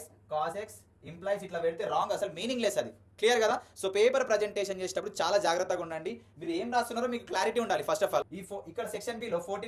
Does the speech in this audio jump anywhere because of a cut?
yes; 1 cut; at 8.3 s

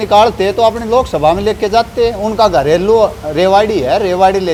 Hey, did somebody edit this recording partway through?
no; 0 cuts

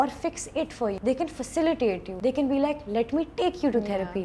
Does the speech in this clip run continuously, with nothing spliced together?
no; 2 cuts; at 1.0 s, 2.1 s

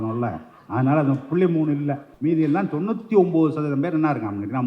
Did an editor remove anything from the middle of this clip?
yes; 1 cut; at 2.0 s

